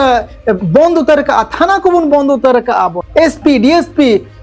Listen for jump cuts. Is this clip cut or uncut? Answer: cut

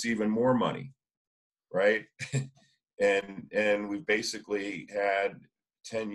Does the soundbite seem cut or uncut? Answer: uncut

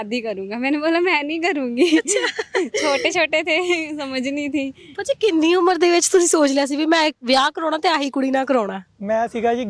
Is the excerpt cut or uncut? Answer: uncut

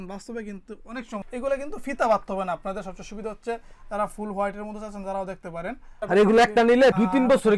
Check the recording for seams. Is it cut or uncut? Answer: cut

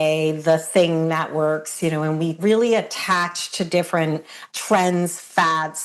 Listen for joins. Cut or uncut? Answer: cut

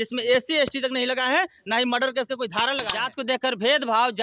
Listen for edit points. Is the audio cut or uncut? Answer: cut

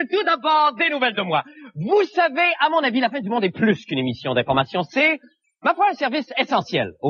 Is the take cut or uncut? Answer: cut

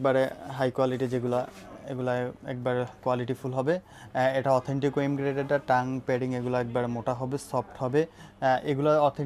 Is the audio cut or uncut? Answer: uncut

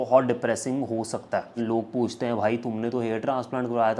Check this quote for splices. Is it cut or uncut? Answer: cut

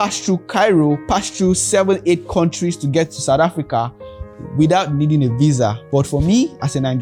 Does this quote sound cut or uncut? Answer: uncut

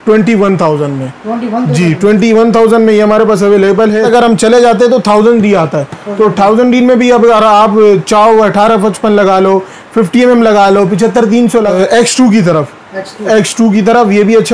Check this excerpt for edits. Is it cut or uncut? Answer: cut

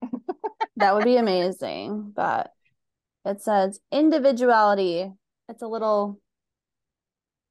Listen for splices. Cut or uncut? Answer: uncut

